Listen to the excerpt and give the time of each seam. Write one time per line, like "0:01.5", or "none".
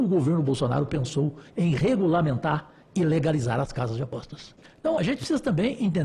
0:04.6